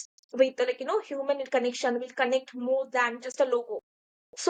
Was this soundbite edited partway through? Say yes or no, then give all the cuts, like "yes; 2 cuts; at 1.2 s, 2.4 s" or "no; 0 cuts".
no; 0 cuts